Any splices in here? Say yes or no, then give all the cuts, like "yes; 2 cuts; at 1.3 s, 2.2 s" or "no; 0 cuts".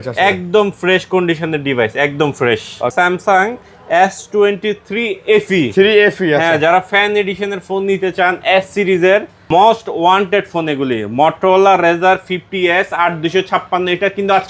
yes; 2 cuts; at 2.9 s, 9.4 s